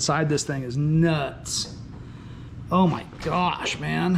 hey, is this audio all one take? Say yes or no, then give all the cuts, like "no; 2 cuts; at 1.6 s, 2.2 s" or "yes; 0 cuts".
yes; 0 cuts